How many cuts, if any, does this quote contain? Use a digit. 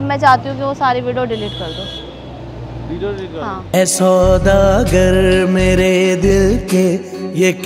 0